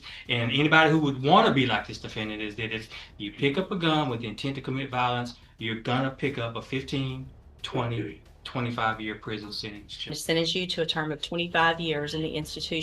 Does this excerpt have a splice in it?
yes; 1 cut; at 10.2 s

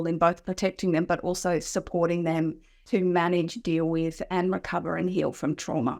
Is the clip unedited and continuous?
yes; 0 cuts

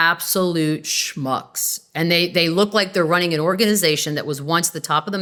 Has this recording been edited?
no; 0 cuts

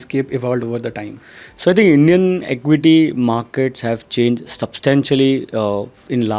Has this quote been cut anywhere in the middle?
no; 0 cuts

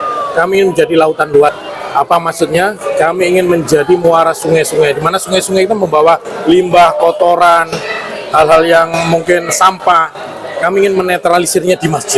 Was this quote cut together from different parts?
yes; 1 cut; at 1.7 s

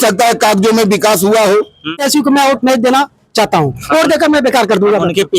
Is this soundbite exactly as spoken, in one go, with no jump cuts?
no; 1 cut; at 2.0 s

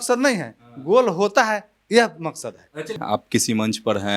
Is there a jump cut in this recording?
yes; 1 cut; at 3.0 s

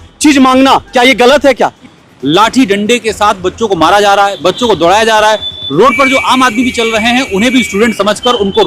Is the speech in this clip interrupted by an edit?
yes; 1 cut; at 1.8 s

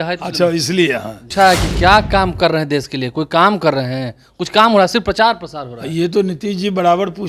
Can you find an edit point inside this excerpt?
yes; 1 cut; at 1.2 s

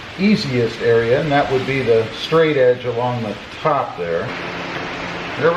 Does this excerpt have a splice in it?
yes; 1 cut; at 4.3 s

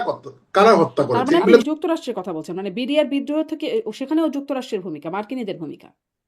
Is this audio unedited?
no; 1 cut; at 1.6 s

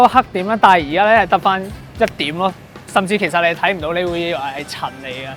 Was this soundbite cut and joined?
yes; 1 cut; at 1.8 s

